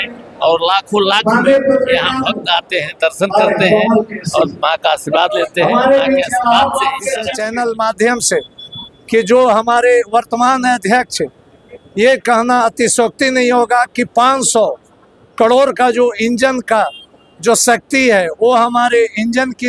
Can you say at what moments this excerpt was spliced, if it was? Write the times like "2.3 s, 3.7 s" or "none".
7.3 s